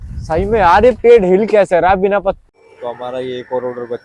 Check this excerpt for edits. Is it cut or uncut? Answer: cut